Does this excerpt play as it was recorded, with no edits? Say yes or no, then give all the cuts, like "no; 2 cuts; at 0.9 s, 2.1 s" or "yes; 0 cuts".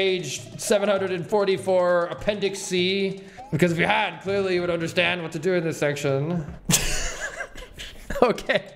no; 1 cut; at 6.5 s